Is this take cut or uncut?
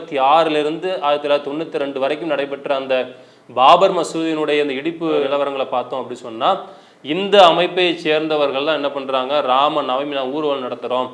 uncut